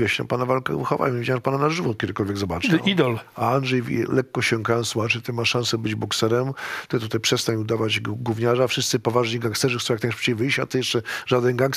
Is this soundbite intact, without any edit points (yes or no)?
yes